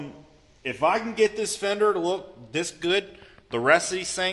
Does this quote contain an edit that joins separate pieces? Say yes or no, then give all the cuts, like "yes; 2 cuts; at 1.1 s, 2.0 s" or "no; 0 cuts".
no; 0 cuts